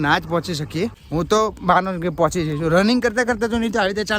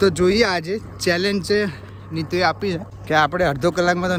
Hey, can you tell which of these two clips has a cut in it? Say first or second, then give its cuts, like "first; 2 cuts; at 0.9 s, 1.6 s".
first; 1 cut; at 1.0 s